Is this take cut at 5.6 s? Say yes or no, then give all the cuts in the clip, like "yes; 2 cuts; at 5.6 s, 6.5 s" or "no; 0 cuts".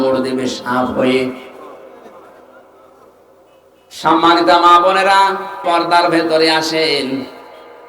yes; 1 cut; at 5.6 s